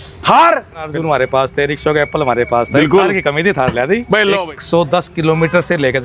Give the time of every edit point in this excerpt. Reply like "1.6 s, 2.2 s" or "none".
1.3 s, 4.4 s